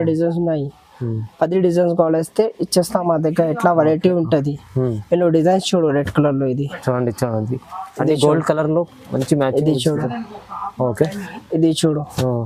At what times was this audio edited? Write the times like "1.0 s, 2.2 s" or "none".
none